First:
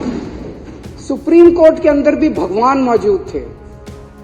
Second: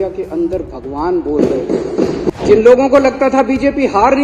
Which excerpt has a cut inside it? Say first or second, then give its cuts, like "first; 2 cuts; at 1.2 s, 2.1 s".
second; 1 cut; at 2.3 s